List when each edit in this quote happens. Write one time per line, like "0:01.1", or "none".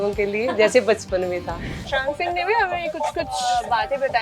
0:01.8
0:03.4